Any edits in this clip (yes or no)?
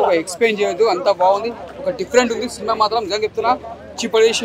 no